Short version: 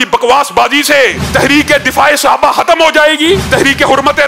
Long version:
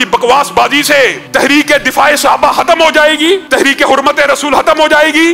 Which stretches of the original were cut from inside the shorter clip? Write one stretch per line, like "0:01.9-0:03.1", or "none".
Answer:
none